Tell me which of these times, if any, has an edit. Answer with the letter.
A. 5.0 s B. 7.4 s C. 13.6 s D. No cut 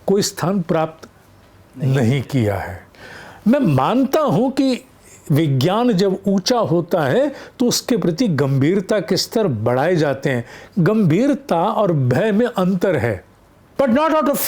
C